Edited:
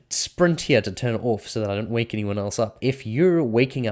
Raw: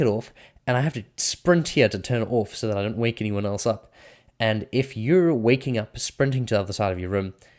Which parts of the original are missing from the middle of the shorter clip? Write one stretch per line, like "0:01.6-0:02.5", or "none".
0:03.8-0:04.7